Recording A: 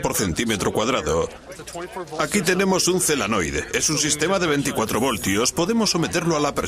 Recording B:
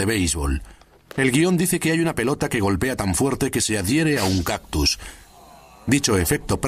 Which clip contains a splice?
A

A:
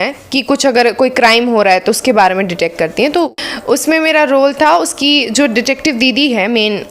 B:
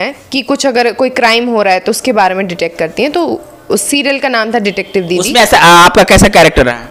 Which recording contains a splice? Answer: A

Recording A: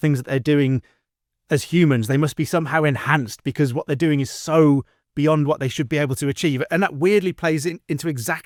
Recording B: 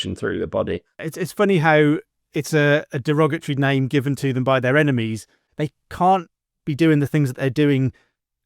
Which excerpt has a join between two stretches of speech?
B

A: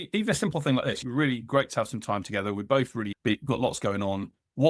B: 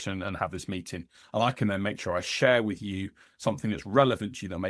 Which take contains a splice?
A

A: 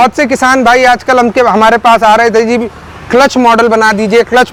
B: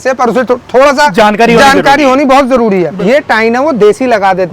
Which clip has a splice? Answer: B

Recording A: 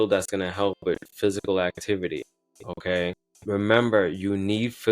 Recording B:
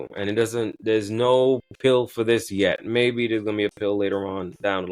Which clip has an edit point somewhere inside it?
A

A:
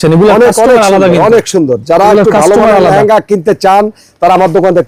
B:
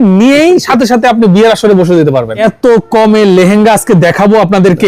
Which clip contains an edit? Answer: B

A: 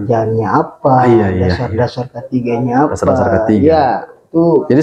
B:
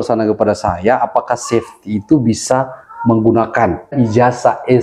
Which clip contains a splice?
B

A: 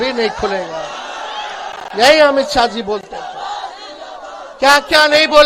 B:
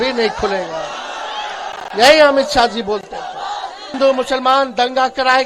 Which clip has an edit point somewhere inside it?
B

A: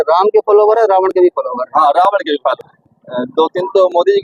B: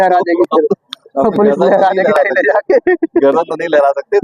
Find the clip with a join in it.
A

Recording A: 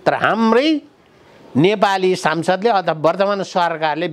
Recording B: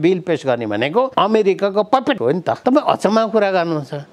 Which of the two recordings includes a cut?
B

